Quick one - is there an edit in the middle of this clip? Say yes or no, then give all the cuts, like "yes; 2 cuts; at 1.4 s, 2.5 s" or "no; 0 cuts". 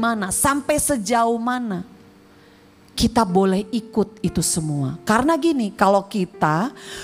no; 0 cuts